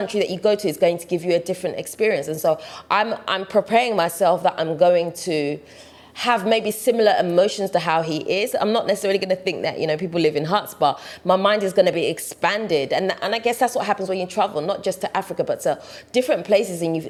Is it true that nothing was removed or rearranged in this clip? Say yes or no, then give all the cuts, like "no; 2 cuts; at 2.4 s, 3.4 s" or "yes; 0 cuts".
yes; 0 cuts